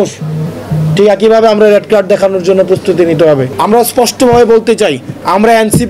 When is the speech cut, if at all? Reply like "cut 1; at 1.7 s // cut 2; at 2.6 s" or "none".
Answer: cut 1; at 3.5 s